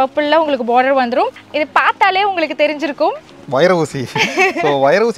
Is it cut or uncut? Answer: cut